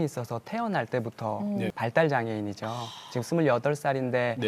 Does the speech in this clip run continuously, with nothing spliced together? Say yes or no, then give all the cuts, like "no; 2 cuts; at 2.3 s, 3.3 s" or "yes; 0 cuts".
no; 1 cut; at 1.7 s